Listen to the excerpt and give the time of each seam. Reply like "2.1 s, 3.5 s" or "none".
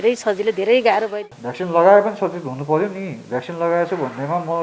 1.2 s